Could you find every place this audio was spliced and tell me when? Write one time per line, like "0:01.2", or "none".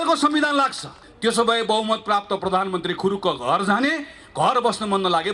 0:01.0